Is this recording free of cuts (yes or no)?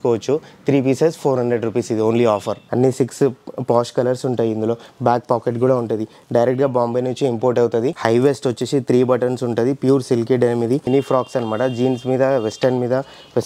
no